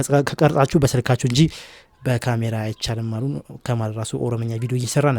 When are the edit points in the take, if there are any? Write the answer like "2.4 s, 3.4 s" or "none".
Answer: none

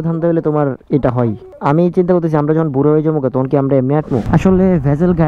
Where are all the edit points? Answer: 4.2 s

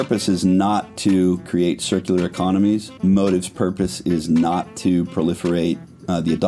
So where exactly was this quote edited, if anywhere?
none

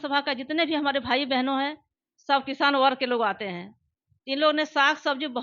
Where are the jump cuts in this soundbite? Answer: none

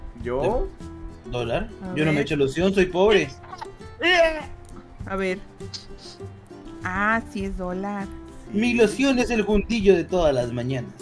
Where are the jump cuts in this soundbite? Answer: none

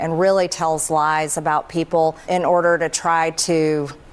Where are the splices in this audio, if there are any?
2.2 s

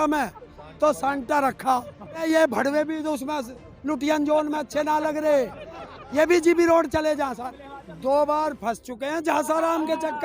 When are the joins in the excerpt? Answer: 2.2 s, 7.5 s

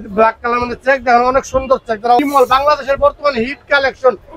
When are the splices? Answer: 2.2 s

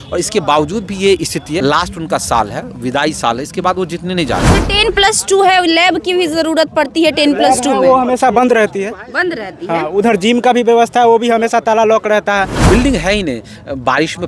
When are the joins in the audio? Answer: 1.6 s, 4.6 s, 12.7 s

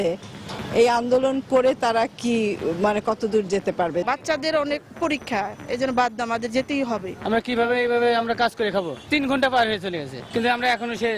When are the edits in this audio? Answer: 4.0 s, 7.1 s, 9.1 s, 10.2 s

